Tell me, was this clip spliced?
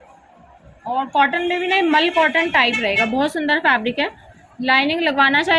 no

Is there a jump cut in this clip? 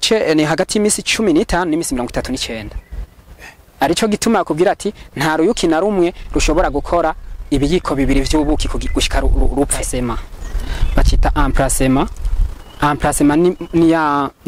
yes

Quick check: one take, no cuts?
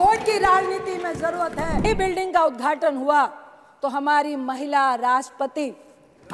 no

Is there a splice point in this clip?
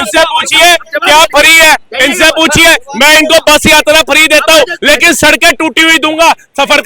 no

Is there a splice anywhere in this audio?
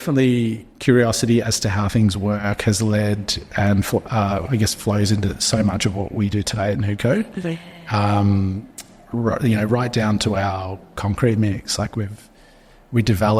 no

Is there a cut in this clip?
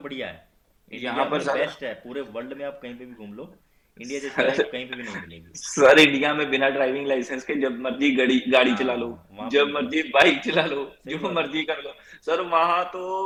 no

